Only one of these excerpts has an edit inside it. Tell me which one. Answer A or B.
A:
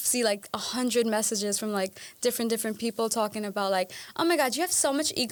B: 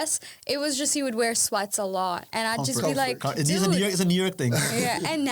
B